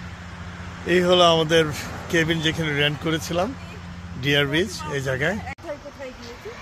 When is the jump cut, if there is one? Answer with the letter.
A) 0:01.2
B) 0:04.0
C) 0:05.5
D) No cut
C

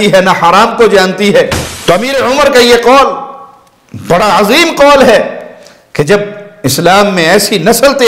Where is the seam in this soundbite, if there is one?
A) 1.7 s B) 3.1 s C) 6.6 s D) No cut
A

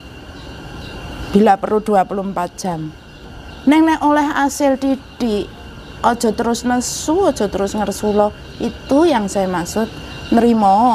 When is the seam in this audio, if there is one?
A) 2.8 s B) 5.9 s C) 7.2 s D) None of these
D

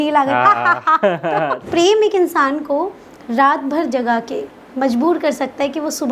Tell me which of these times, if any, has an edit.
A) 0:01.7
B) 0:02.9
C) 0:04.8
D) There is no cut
A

